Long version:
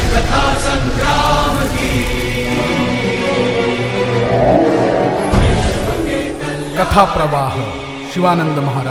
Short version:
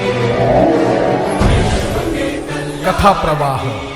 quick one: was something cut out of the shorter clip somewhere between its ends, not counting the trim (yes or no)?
no